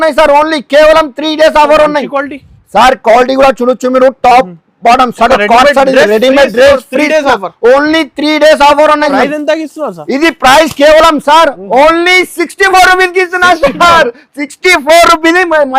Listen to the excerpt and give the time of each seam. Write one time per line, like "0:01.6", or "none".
0:09.1